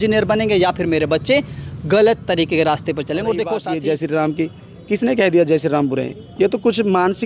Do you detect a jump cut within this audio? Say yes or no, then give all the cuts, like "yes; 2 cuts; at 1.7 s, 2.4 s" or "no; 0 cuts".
yes; 1 cut; at 3.7 s